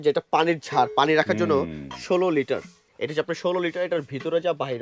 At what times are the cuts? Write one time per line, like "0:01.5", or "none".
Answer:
0:02.8